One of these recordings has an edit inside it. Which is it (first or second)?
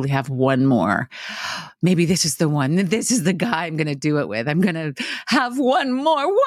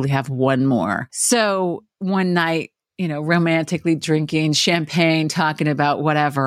second